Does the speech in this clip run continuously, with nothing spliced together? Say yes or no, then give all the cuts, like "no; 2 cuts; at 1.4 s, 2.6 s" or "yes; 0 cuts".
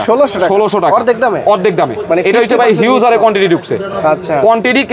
yes; 0 cuts